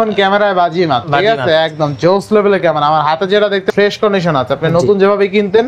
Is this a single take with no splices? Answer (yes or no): no